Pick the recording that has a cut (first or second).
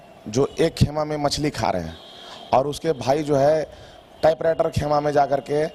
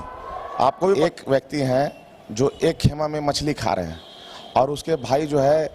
second